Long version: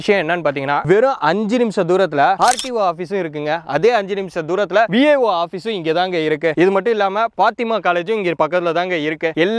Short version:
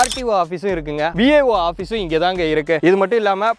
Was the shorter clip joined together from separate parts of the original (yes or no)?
yes